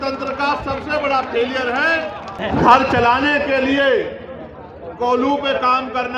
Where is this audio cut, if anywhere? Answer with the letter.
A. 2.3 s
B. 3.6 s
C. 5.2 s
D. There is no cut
A